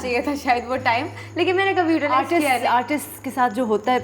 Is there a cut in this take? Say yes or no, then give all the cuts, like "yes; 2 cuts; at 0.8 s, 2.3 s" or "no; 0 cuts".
no; 0 cuts